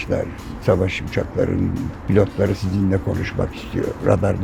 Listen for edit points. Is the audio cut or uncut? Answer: uncut